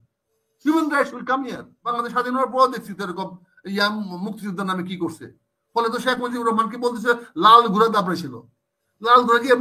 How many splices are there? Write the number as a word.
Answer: one